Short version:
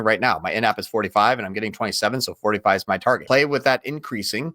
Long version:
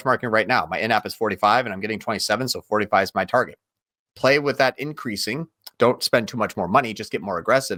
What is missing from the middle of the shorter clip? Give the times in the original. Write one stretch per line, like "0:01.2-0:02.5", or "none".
0:03.5-0:04.2